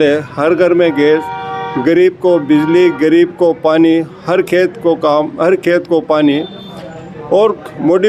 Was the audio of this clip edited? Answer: no; 0 cuts

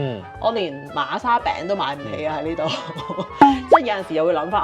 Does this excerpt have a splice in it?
no; 0 cuts

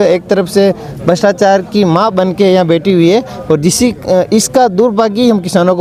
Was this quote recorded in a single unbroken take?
yes; 0 cuts

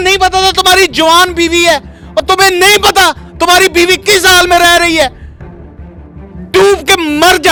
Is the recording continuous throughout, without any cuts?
yes; 0 cuts

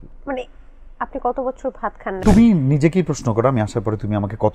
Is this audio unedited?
no; 1 cut; at 2.2 s

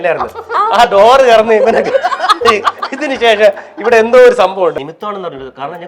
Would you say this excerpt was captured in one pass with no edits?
no; 1 cut; at 4.8 s

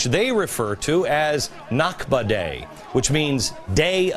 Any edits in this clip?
no; 0 cuts

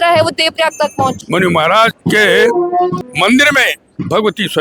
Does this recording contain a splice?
yes; 3 cuts; at 1.2 s, 2.0 s, 3.0 s

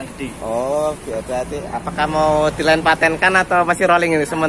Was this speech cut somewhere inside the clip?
no; 0 cuts

